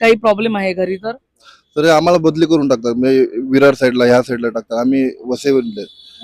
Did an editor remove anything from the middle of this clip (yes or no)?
no